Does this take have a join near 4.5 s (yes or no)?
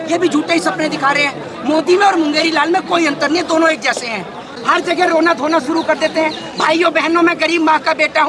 yes